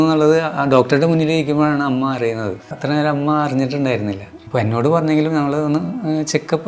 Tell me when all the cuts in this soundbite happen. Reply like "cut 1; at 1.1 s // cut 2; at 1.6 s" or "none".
cut 1; at 2.8 s // cut 2; at 4.3 s